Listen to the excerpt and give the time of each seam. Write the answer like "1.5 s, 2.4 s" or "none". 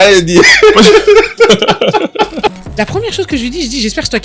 2.6 s

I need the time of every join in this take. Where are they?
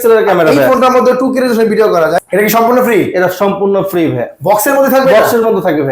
2.2 s

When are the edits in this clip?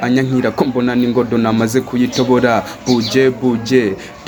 none

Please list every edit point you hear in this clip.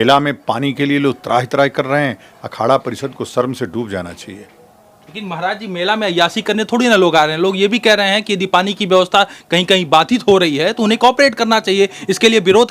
none

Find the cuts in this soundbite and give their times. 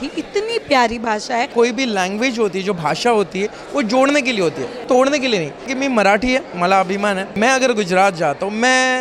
1.5 s, 4.8 s, 5.7 s, 7.3 s

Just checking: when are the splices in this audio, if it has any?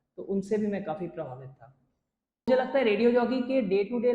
2.5 s

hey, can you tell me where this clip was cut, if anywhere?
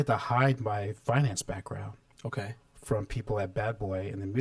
none

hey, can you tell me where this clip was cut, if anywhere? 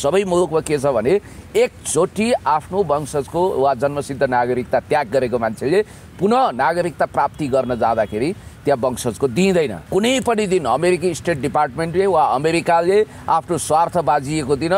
9.9 s

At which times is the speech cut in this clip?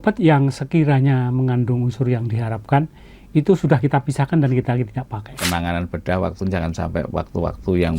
5.4 s

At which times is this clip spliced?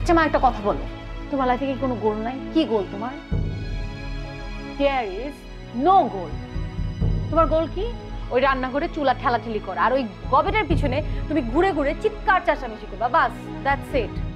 none

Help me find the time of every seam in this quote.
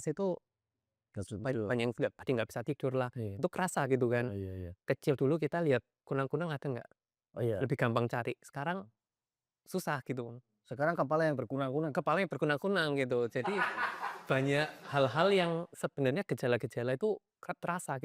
none

